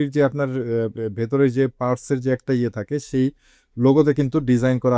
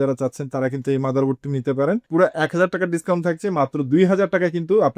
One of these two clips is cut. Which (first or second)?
second